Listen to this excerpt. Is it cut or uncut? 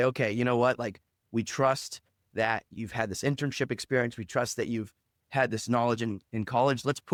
uncut